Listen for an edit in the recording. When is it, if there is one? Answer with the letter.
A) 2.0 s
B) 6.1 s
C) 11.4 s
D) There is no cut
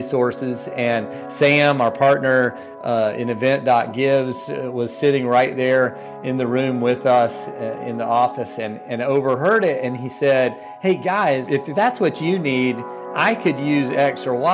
C